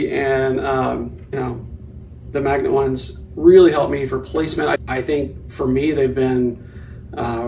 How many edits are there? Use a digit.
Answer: 2